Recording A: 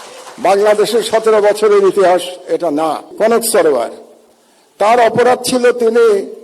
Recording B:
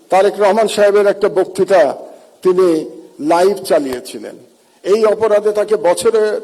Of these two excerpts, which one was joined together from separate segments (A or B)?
A